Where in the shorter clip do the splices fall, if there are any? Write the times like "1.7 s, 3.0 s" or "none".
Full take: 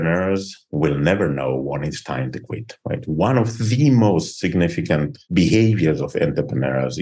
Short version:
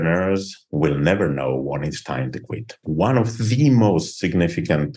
2.8 s